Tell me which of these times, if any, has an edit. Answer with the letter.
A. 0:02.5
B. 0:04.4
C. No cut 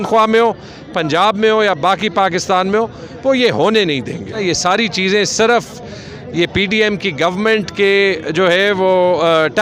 B